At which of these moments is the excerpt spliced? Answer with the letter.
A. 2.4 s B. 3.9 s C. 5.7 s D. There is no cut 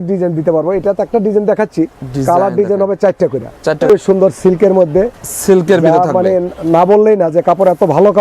B